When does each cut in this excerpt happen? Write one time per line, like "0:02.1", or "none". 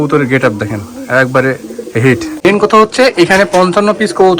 0:02.3